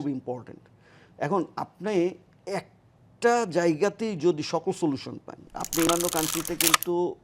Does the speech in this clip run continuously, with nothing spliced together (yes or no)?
no